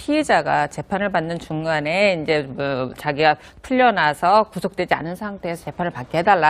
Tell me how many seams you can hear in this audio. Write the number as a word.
one